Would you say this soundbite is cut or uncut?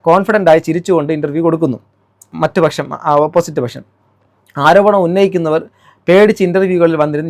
uncut